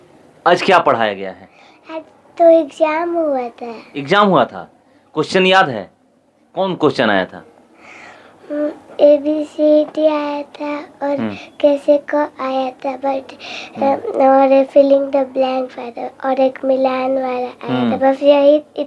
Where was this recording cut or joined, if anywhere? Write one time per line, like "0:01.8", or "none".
none